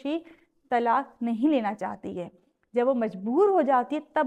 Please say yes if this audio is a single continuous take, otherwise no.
yes